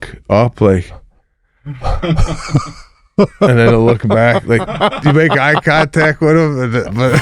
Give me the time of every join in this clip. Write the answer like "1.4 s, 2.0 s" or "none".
none

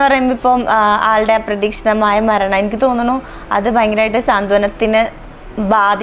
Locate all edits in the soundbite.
none

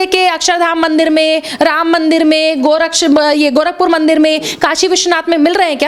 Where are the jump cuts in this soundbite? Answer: none

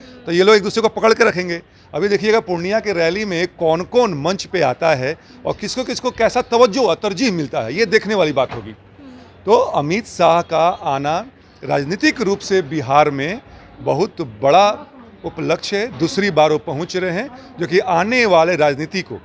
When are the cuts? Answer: none

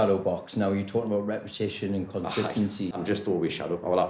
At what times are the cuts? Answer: 3.0 s

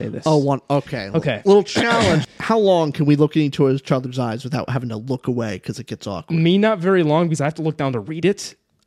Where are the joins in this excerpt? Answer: 2.2 s

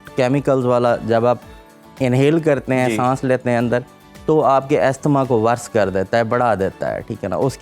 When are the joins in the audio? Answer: none

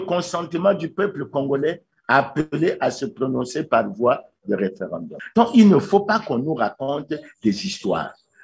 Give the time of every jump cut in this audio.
5.2 s

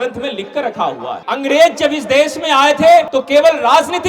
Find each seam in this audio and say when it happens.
1.2 s, 3.2 s

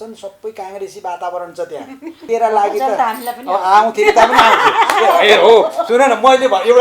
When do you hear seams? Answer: 2.2 s

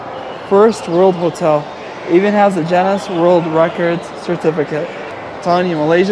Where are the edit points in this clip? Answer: 5.1 s

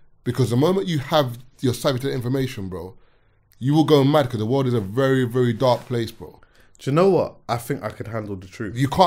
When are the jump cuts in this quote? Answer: none

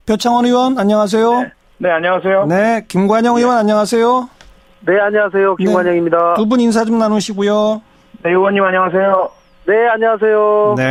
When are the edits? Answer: none

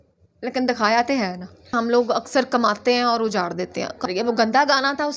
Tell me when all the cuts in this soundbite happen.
1.7 s, 4.1 s

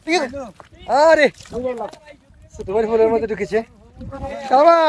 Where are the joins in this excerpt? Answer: none

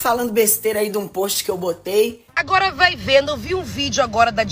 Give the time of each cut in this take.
2.3 s

